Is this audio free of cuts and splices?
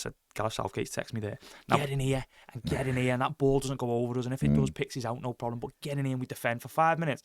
no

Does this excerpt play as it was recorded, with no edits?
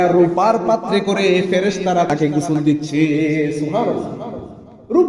no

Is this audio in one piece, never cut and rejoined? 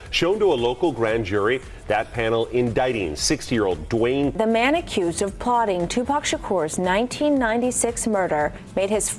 yes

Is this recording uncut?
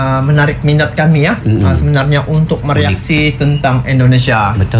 yes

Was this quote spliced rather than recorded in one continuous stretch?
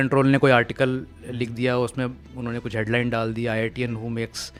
no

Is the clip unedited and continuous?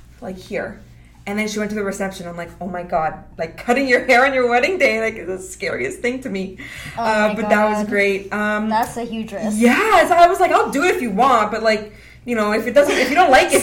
yes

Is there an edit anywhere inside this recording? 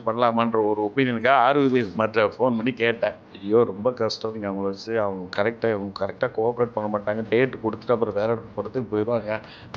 yes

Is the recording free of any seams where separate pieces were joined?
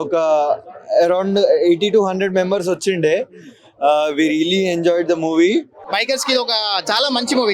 no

